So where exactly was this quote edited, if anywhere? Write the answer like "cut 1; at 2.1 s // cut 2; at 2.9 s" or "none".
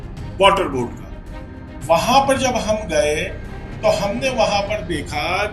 none